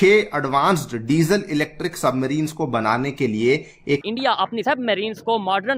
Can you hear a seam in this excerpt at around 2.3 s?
no; 1 cut; at 4.1 s

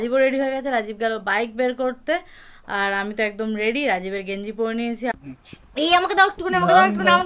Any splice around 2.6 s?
no; 1 cut; at 5.1 s

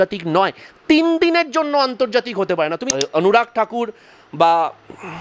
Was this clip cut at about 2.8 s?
yes; 1 cut; at 2.8 s

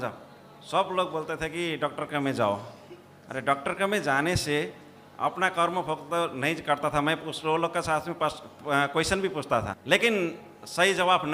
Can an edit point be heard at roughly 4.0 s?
no; 1 cut; at 9.8 s

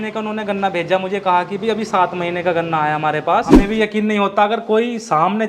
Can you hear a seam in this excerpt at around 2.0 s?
no; 1 cut; at 3.6 s

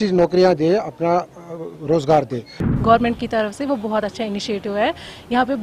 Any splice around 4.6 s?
no; 1 cut; at 2.6 s

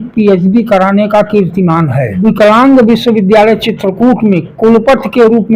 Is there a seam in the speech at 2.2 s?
yes; 1 cut; at 2.2 s

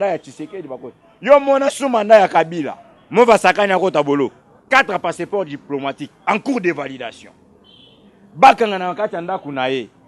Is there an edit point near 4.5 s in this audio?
yes; 1 cut; at 4.5 s

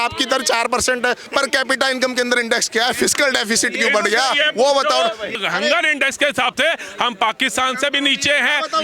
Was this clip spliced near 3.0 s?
no; 2 cuts; at 1.3 s, 5.4 s

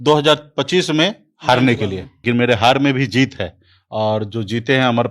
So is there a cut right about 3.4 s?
no; 1 cut; at 2.1 s

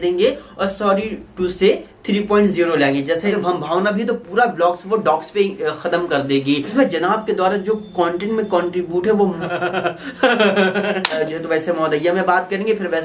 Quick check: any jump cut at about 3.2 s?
yes; 4 cuts; at 3.2 s, 6.6 s, 9.4 s, 11.2 s

